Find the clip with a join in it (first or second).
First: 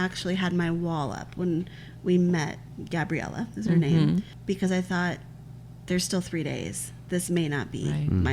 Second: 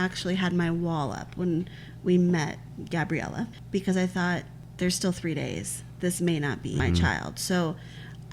second